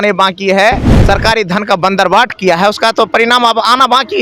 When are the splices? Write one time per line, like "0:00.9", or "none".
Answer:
0:00.9